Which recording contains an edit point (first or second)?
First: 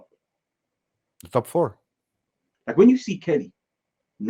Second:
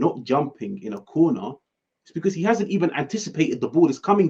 first